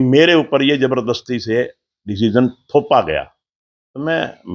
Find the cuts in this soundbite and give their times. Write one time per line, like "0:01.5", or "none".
none

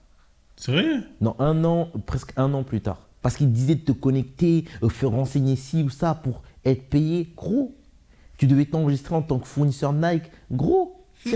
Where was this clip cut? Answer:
0:03.1

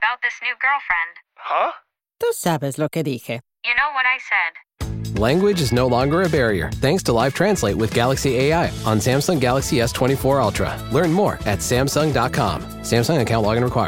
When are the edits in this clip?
none

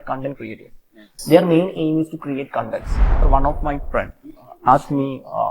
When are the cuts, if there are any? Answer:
0:03.3

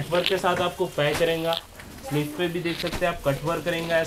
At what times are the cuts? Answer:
none

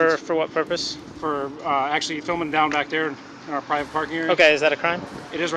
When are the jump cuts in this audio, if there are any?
none

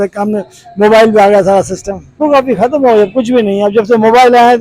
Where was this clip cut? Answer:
0:02.2

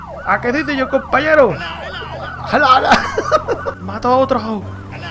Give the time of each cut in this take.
0:03.7

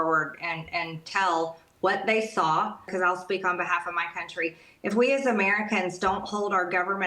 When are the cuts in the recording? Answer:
0:02.8

